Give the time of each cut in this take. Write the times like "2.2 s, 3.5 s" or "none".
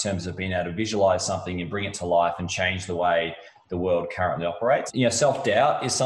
4.9 s